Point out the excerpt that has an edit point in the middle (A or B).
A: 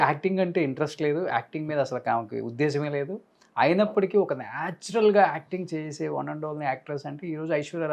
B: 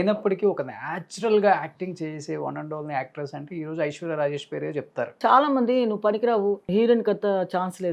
B